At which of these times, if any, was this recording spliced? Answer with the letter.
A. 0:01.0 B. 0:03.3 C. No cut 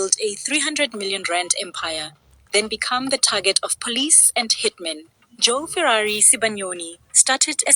B